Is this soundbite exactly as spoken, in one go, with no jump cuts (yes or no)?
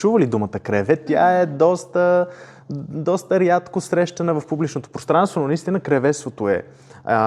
yes